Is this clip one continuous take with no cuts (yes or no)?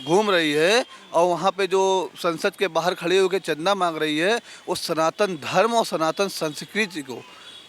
yes